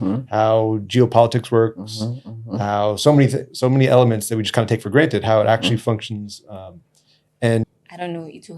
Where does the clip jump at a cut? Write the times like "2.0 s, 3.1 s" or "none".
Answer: 7.6 s